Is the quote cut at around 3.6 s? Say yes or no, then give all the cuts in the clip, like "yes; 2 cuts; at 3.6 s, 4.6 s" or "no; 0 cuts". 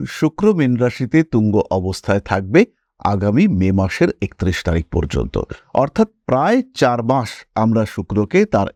no; 0 cuts